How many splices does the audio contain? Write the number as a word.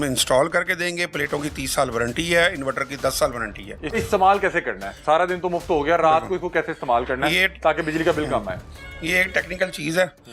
one